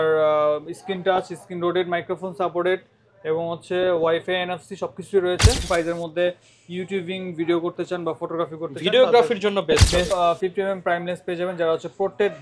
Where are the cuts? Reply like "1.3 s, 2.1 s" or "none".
5.6 s, 10.1 s